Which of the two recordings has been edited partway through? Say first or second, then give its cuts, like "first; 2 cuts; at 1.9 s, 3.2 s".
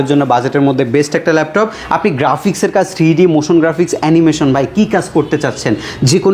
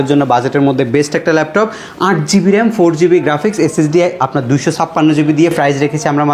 first; 1 cut; at 1.8 s